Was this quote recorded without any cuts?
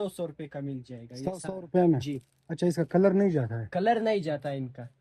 yes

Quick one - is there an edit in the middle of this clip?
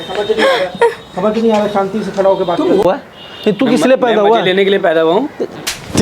yes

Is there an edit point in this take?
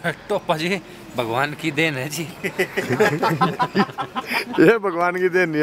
no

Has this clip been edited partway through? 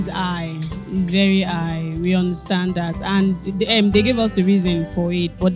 no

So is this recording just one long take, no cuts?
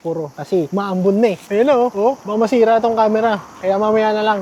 yes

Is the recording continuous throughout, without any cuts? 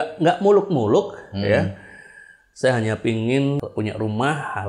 no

